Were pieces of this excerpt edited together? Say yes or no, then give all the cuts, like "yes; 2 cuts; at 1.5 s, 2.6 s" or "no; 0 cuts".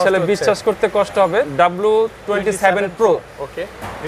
yes; 1 cut; at 1.5 s